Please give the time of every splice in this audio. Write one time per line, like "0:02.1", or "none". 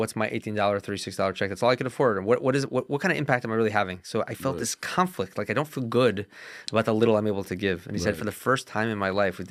none